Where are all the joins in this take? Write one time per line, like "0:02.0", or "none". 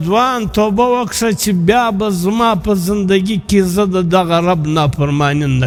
none